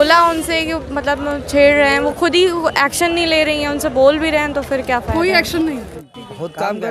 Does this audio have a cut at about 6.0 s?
yes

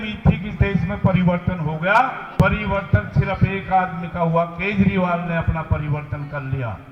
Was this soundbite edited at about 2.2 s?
yes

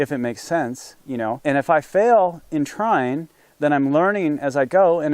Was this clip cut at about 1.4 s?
yes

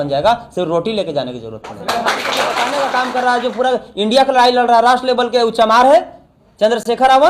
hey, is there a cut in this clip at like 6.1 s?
no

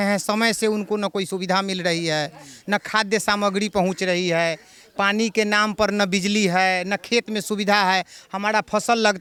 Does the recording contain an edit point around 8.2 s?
no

